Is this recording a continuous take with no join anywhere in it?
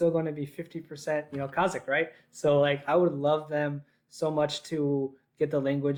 yes; 0 cuts

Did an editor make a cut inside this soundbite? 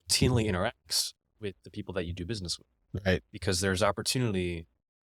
no; 0 cuts

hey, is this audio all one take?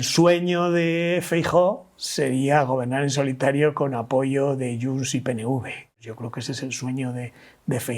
no; 1 cut; at 6.0 s

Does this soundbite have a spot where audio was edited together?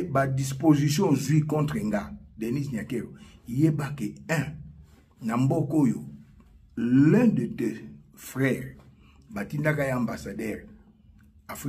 no; 0 cuts

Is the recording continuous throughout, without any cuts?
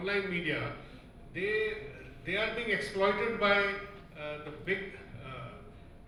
yes; 0 cuts

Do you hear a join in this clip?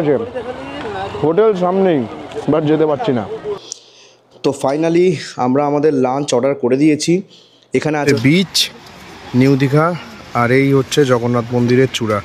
yes; 2 cuts; at 3.3 s, 8.0 s

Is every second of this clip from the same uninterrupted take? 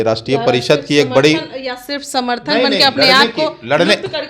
yes; 0 cuts

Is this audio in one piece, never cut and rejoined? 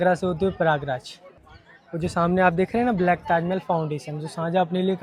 yes; 0 cuts

